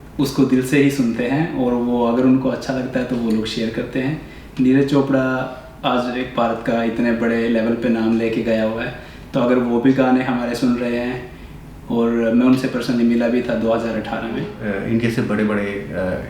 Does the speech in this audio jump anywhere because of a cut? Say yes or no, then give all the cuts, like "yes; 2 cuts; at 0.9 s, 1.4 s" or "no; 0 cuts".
yes; 1 cut; at 14.5 s